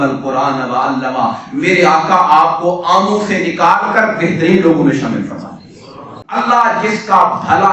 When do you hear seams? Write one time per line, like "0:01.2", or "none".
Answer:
0:06.2